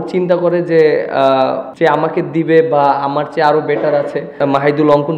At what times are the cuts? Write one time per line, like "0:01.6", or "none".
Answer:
0:01.7
0:04.4